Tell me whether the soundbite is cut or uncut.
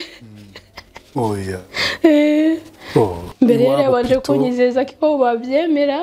cut